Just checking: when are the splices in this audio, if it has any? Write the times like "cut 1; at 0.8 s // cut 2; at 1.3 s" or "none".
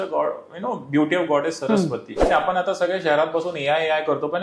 cut 1; at 2.2 s